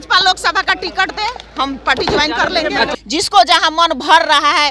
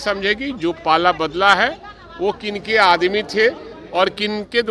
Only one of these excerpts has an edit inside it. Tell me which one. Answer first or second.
first